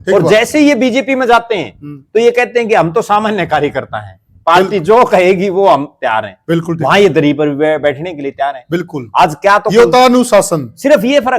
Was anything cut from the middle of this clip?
no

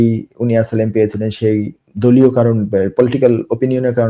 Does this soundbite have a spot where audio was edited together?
yes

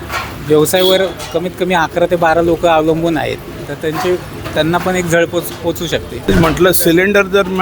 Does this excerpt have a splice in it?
yes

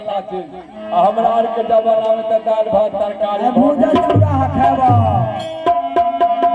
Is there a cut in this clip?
no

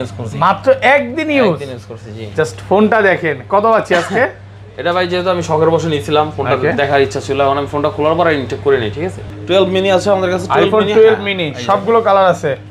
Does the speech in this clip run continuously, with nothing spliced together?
no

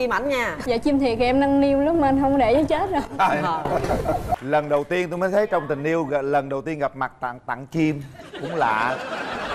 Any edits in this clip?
yes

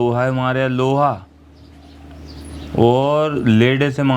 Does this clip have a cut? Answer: no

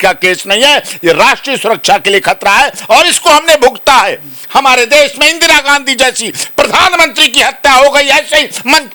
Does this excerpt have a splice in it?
no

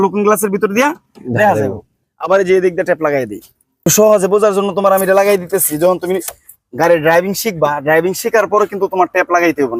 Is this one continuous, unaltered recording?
no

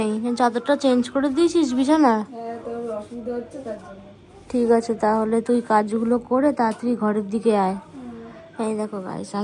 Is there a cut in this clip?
no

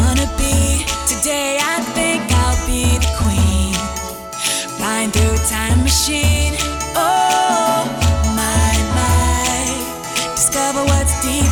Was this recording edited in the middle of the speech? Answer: no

